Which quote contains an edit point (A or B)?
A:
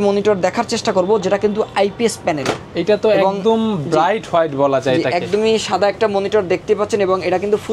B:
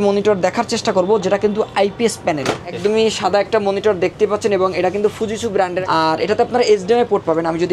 B